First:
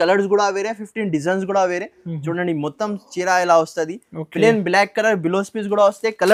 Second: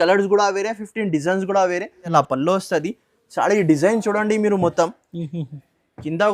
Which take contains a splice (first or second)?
second